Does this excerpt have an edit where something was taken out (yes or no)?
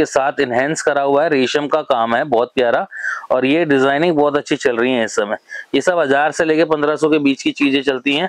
no